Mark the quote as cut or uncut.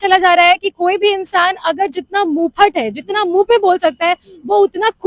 uncut